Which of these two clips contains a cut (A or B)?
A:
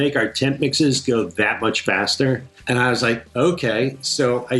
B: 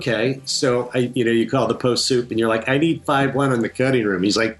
A